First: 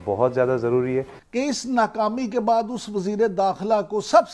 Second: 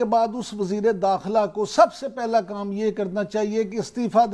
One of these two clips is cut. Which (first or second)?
first